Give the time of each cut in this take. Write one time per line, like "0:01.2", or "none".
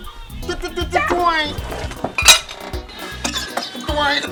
none